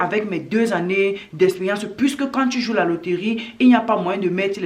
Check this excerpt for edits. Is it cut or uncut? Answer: uncut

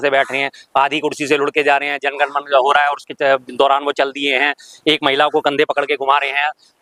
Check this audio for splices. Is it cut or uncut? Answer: uncut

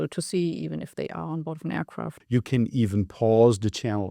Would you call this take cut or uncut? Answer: cut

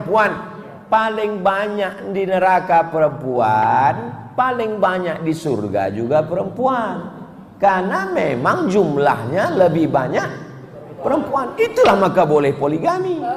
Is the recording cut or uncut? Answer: uncut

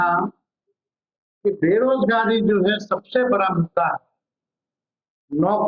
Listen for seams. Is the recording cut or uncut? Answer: uncut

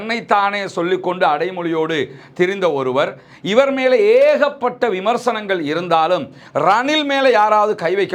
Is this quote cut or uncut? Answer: uncut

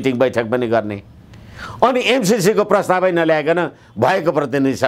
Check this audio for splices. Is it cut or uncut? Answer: uncut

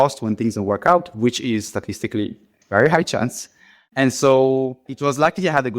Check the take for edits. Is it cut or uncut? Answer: cut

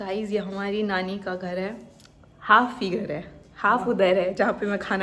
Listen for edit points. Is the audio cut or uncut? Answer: uncut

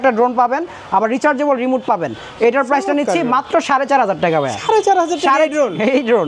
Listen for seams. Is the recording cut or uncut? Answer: uncut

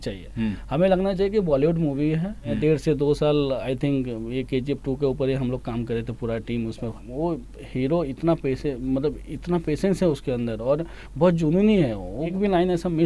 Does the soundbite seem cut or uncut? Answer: cut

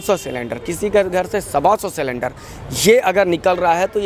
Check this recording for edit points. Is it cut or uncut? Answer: uncut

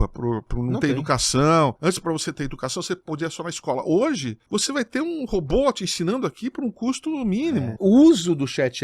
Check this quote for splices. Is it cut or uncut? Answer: cut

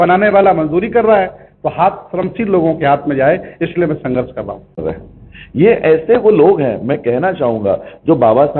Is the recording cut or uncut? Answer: cut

